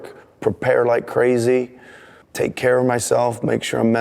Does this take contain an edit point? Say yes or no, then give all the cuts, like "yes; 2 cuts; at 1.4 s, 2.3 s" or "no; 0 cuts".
yes; 1 cut; at 2.2 s